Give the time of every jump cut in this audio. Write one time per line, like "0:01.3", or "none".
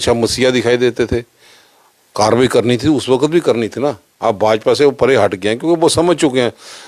none